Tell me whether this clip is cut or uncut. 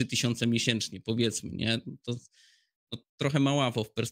uncut